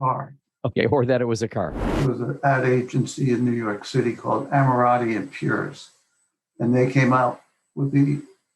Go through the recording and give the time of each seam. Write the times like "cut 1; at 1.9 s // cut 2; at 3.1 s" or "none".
cut 1; at 1.9 s